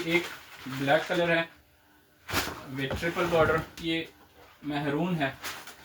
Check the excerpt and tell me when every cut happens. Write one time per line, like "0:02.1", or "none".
0:03.8